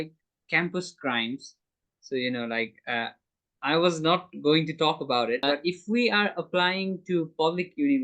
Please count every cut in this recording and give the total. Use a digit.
1